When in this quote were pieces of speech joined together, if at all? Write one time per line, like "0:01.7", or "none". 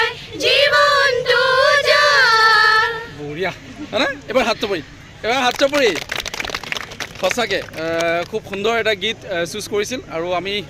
none